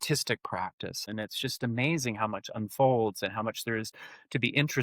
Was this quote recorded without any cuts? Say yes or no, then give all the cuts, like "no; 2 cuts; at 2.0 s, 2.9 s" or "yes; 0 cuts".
no; 1 cut; at 1.1 s